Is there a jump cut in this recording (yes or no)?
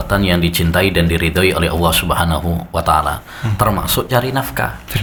no